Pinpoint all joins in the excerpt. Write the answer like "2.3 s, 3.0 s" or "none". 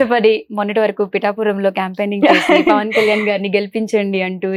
none